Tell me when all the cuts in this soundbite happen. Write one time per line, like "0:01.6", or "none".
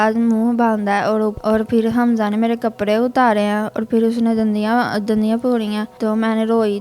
0:01.3
0:05.9